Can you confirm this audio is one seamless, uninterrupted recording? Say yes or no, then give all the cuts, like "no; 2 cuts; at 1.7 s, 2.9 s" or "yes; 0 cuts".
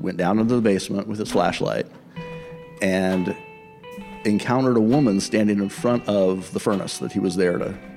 yes; 0 cuts